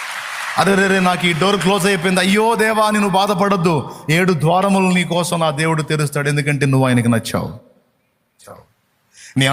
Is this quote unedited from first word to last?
yes; 0 cuts

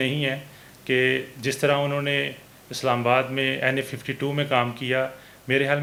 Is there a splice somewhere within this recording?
no; 0 cuts

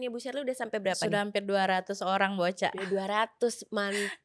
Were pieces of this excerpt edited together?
no; 0 cuts

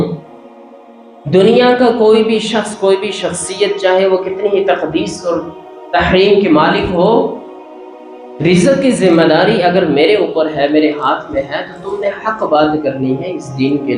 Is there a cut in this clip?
no; 0 cuts

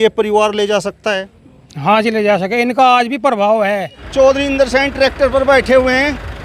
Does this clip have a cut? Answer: yes; 1 cut; at 4.0 s

